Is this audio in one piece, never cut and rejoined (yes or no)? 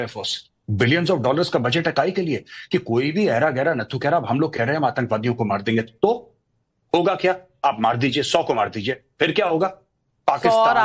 yes